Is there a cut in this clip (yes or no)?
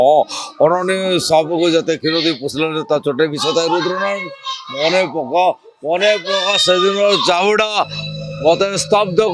no